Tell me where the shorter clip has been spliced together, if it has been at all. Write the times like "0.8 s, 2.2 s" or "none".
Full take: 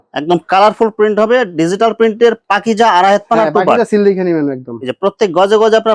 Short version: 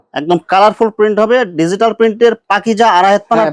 none